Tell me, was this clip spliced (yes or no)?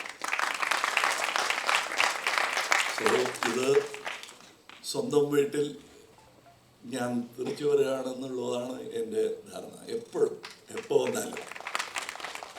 no